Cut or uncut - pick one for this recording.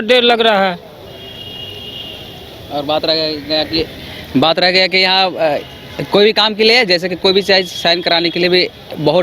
uncut